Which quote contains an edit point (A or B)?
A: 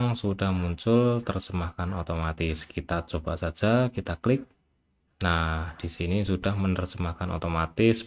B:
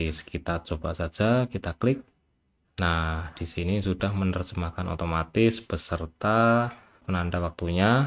B